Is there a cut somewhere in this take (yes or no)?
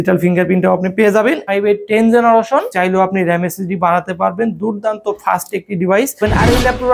yes